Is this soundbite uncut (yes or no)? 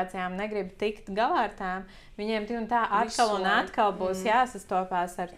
yes